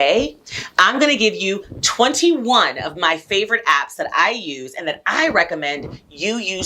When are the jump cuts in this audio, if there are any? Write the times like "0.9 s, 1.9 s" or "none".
none

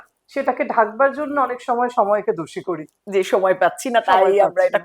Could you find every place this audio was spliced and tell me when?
none

